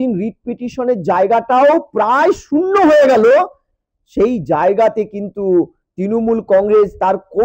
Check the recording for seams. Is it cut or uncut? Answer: uncut